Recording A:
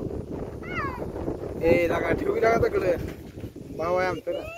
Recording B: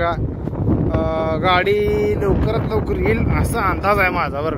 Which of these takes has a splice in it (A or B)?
A